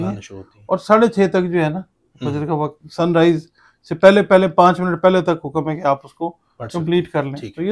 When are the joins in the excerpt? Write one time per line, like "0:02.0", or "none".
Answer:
none